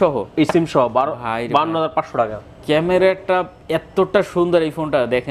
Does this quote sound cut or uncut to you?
uncut